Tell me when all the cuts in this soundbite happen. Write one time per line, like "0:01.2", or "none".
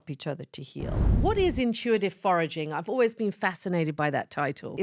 0:01.0